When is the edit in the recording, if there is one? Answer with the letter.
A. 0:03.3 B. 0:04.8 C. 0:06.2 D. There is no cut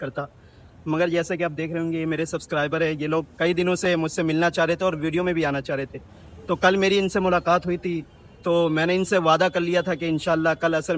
D